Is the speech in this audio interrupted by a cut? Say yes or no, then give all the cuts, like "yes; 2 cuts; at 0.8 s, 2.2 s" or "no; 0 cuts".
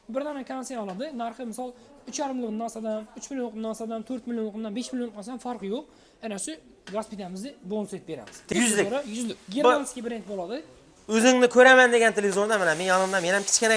yes; 1 cut; at 8.5 s